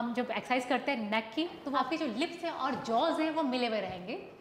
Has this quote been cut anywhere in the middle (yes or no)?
yes